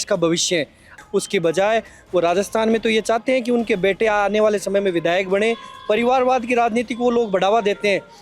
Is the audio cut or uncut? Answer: cut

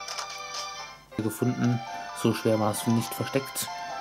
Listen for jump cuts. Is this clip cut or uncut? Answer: cut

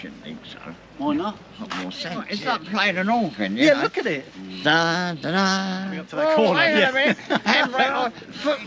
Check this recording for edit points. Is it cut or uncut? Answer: cut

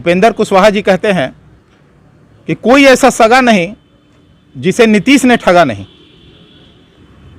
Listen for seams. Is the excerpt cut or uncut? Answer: uncut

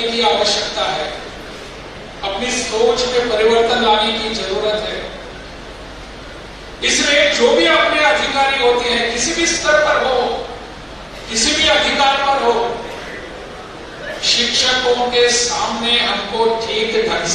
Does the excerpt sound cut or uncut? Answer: uncut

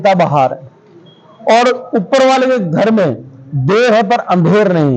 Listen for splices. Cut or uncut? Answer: uncut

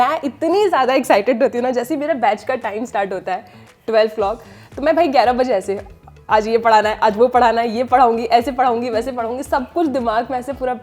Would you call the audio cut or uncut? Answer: uncut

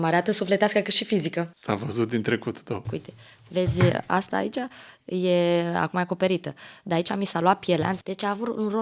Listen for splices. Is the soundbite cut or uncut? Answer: cut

